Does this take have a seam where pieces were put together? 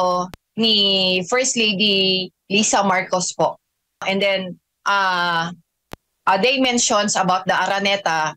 yes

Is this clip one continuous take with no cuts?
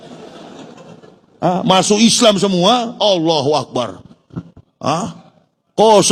yes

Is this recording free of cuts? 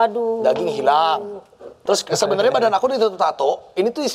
no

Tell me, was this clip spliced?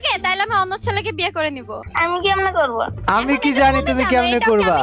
yes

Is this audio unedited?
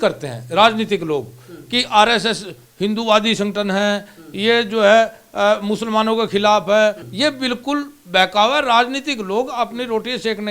no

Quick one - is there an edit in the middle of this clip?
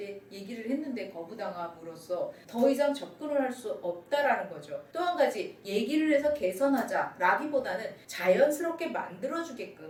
no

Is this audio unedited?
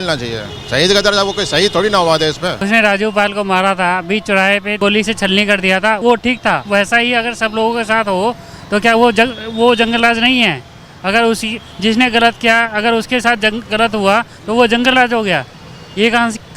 no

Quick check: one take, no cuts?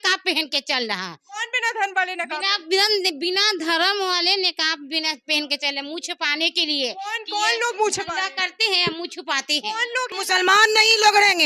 no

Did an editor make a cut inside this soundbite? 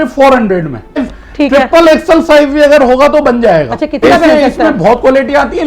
yes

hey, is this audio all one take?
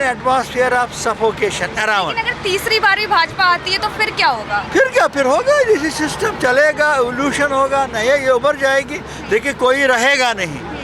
yes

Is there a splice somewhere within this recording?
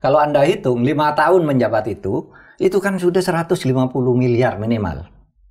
no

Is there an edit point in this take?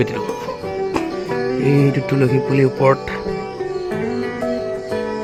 no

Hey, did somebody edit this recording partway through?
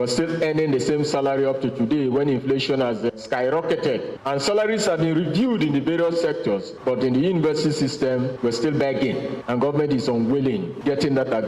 no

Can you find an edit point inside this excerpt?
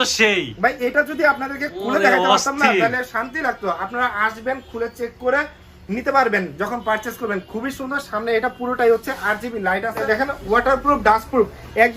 yes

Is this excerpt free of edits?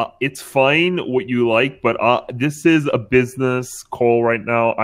yes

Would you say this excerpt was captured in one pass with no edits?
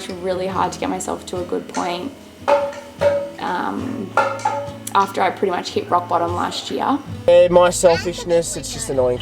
no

